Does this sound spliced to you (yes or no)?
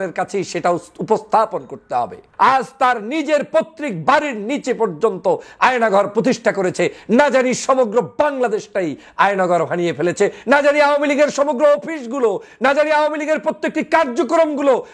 yes